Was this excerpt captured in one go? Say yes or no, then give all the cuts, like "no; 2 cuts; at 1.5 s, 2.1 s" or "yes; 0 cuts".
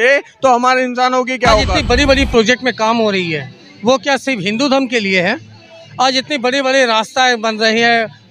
no; 1 cut; at 1.7 s